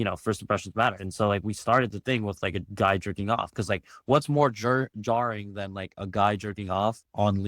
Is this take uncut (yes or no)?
yes